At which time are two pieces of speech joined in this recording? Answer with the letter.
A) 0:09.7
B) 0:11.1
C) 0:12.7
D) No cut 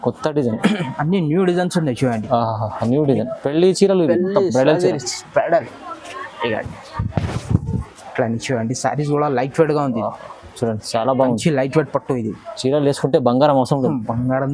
D